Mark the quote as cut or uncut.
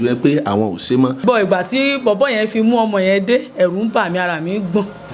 cut